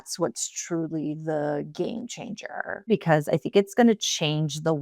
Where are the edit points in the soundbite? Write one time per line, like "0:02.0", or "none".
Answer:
0:02.9